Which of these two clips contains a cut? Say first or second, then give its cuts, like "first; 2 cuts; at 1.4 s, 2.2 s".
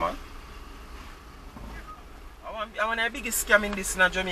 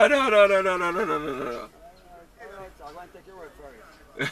first; 1 cut; at 2.5 s